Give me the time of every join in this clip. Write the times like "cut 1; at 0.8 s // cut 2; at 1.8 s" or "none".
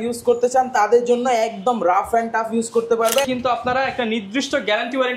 cut 1; at 3.3 s